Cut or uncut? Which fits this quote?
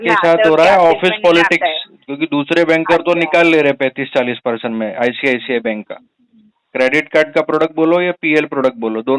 uncut